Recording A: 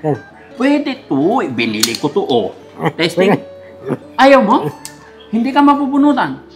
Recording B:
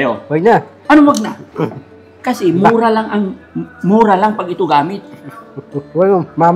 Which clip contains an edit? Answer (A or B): A